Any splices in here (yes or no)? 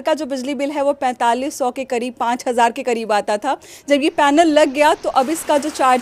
no